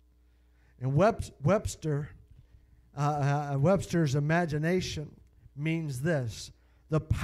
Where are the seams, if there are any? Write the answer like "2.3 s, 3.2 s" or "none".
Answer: 3.9 s